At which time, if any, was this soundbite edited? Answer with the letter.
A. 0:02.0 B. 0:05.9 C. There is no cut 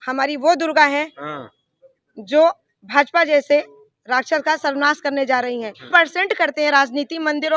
B